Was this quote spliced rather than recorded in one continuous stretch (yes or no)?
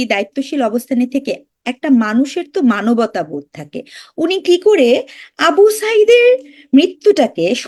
no